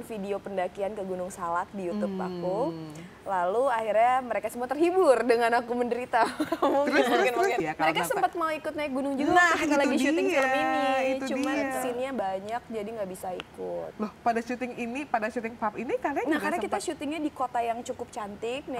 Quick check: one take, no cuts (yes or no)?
no